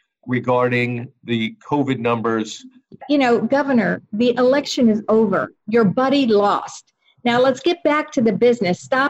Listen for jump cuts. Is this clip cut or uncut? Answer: cut